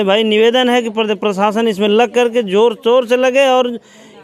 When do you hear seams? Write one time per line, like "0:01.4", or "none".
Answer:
none